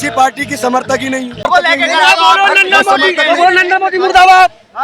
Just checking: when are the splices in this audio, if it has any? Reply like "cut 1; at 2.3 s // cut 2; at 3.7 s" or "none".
cut 1; at 1.5 s

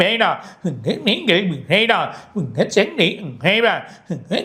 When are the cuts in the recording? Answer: none

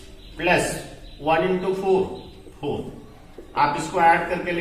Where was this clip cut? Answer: none

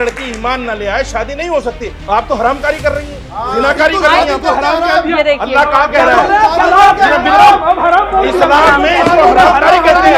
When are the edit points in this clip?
none

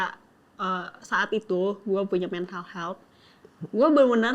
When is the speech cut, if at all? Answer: none

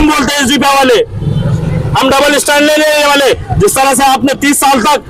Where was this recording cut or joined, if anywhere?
none

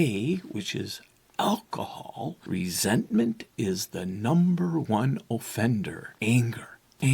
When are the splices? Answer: cut 1; at 2.4 s // cut 2; at 6.0 s

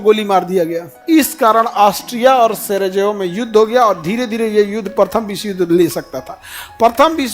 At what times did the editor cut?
cut 1; at 0.9 s

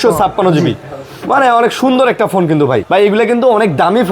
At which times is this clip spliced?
cut 1; at 2.8 s

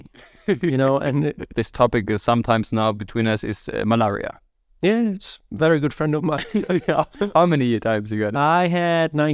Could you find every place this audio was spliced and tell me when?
cut 1; at 1.5 s

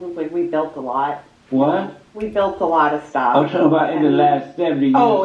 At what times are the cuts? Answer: cut 1; at 1.3 s // cut 2; at 4.5 s

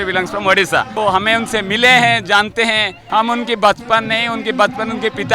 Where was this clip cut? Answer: cut 1; at 0.9 s // cut 2; at 3.0 s

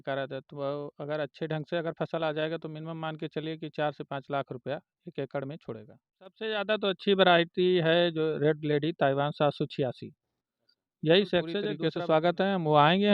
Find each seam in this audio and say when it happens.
cut 1; at 6.4 s // cut 2; at 11.8 s

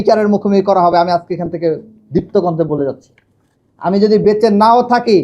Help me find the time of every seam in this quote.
none

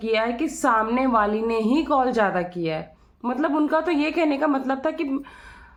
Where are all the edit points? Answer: none

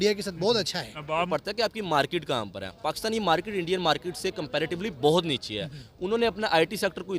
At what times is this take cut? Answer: cut 1; at 1.3 s

